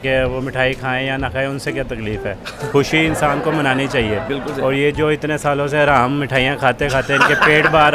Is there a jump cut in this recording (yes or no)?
no